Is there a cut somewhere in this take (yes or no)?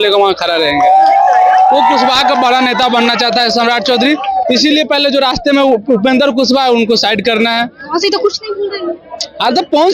no